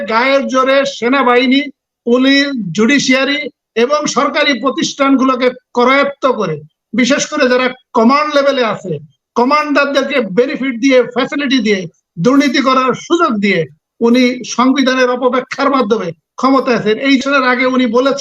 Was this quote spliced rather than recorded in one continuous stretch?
yes; 1 cut; at 17.2 s

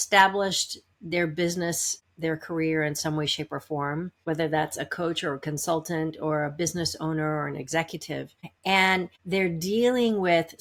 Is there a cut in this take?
no; 0 cuts

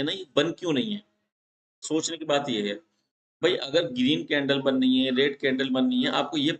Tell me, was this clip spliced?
no; 0 cuts

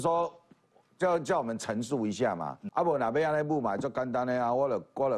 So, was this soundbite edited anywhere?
yes; 1 cut; at 2.6 s

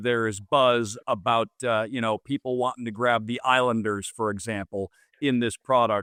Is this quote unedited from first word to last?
yes; 0 cuts

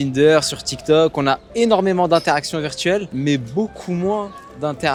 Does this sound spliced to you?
no; 0 cuts

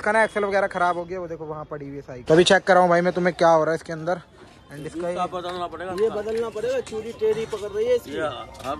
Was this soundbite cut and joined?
no; 0 cuts

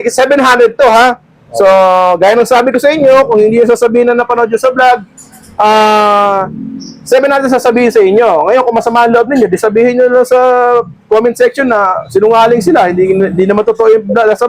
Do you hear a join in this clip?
no; 0 cuts

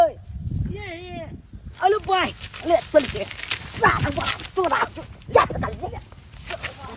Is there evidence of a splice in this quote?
no; 0 cuts

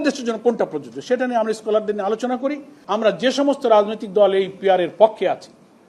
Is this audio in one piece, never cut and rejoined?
no; 1 cut; at 2.7 s

